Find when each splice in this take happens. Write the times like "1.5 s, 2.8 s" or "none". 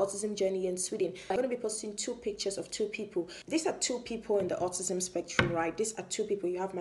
1.3 s, 3.4 s